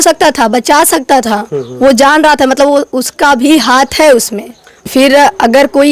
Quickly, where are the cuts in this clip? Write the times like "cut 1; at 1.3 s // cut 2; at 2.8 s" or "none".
cut 1; at 4.9 s